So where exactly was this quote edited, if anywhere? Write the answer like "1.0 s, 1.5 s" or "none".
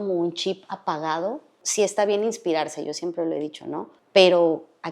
1.6 s, 3.9 s